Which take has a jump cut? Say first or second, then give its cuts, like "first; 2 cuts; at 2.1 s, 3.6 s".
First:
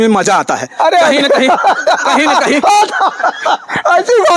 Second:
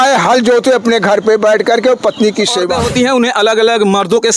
second; 1 cut; at 2.7 s